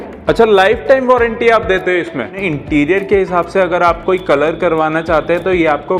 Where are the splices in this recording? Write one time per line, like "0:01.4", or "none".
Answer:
0:02.4